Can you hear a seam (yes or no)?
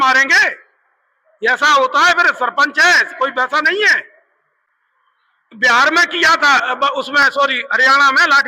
no